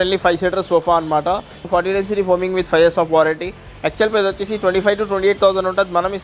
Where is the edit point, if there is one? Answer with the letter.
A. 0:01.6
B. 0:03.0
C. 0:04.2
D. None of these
A